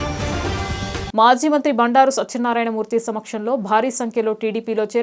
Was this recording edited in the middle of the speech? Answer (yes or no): yes